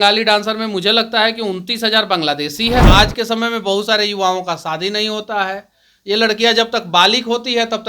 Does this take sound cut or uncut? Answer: cut